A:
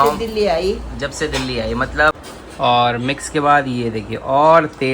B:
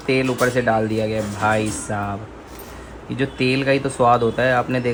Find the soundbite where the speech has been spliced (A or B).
A